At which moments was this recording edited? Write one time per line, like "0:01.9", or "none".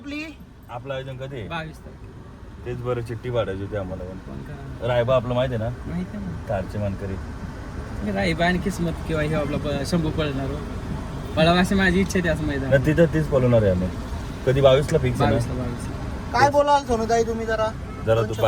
none